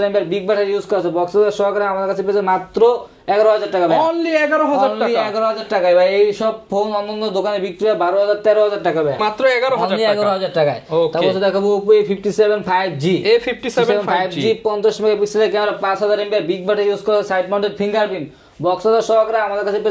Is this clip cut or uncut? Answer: uncut